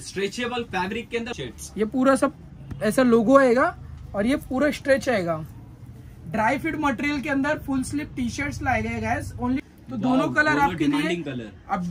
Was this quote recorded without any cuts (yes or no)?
no